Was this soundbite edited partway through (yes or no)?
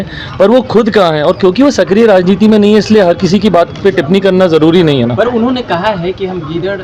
no